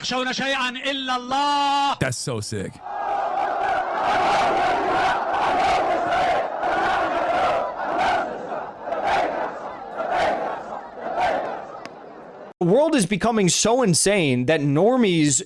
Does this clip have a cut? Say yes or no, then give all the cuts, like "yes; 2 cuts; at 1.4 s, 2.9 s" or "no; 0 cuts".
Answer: yes; 1 cut; at 12.6 s